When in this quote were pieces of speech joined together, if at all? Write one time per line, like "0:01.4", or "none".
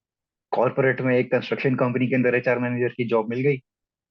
none